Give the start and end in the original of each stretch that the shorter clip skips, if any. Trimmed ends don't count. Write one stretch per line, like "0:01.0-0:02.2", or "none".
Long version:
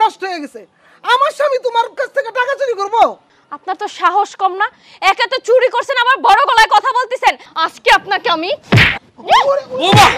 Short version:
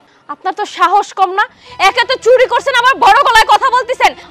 none